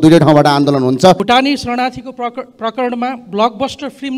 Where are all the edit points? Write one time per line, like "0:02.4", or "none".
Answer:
0:01.2